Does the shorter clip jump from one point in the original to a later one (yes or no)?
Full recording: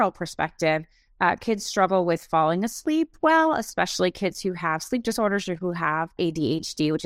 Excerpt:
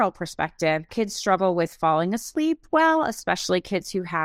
yes